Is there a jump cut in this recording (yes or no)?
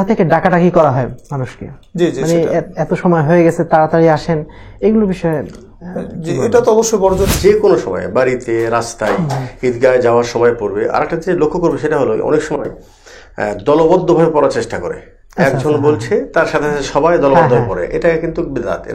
yes